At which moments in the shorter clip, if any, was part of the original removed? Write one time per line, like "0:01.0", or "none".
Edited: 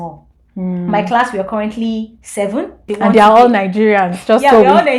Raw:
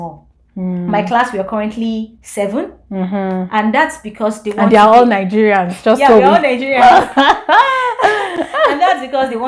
0:02.8